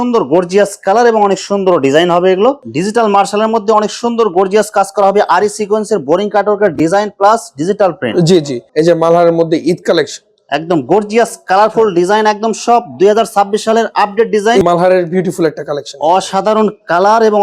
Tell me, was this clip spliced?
yes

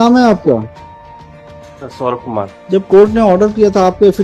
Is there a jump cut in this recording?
yes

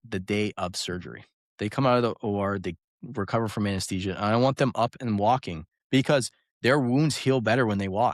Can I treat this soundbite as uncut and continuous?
yes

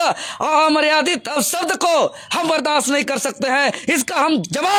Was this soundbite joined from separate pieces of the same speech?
no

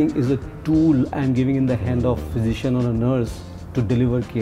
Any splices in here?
no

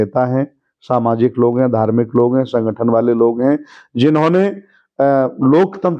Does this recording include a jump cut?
no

